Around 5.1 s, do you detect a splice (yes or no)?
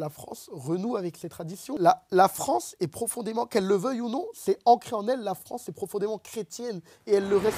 no